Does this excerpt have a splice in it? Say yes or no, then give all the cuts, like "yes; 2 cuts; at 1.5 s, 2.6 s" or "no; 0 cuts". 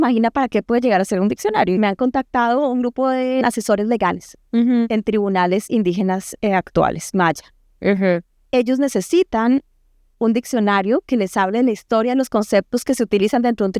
yes; 2 cuts; at 1.8 s, 3.4 s